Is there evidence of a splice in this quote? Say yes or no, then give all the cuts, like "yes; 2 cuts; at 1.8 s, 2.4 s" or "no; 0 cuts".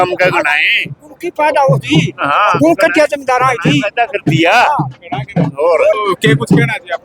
yes; 1 cut; at 6.0 s